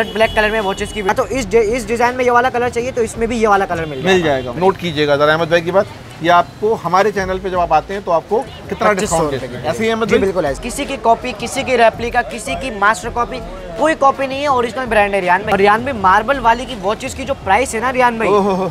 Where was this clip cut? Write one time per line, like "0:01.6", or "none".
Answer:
0:01.1
0:04.5
0:10.6
0:15.5